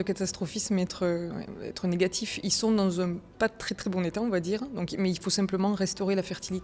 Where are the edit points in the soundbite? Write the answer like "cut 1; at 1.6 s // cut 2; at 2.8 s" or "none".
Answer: none